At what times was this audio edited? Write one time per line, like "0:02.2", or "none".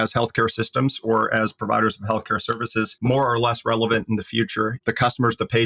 0:04.8